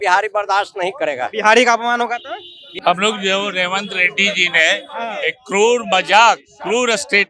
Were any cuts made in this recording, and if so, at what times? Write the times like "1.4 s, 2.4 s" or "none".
2.6 s

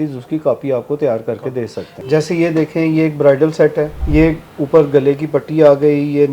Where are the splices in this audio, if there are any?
1.9 s, 4.0 s

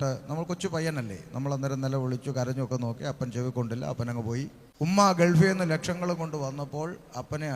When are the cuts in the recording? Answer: 4.6 s

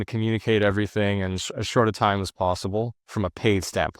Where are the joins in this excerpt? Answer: none

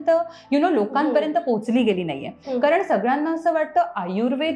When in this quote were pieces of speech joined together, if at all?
2.4 s

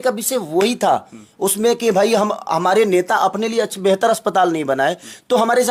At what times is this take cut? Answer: none

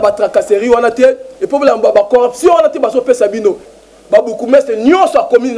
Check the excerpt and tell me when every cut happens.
3.7 s

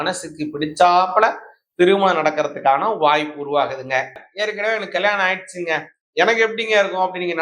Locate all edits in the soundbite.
4.2 s

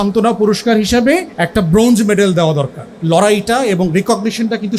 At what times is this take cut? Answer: 1.4 s, 2.8 s

